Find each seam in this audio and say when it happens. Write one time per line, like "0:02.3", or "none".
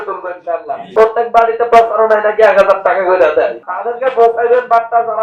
0:00.9
0:03.7